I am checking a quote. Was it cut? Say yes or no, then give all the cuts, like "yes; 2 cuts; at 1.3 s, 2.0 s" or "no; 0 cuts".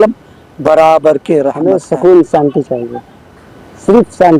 yes; 1 cut; at 1.6 s